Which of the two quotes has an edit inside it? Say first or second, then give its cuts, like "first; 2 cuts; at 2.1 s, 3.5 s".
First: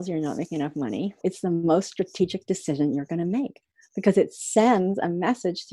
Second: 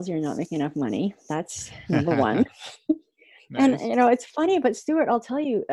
first; 1 cut; at 1.2 s